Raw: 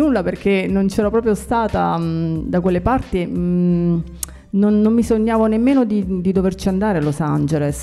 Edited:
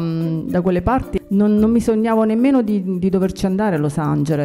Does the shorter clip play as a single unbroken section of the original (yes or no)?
no